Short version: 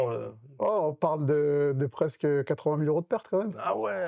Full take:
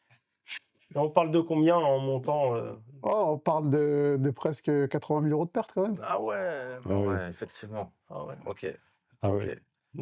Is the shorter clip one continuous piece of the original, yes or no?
yes